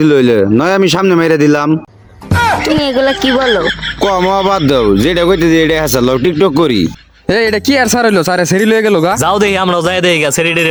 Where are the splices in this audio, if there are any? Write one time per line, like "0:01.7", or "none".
none